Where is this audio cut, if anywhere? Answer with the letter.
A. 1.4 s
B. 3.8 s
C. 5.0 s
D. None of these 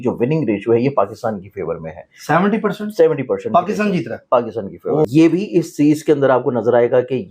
C